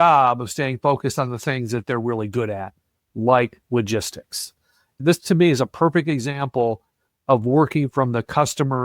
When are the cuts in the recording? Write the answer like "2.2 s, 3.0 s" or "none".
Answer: 5.0 s